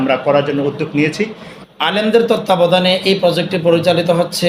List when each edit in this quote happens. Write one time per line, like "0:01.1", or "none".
0:01.5